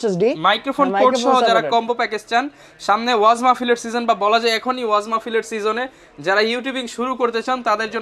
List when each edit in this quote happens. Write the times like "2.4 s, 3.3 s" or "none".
none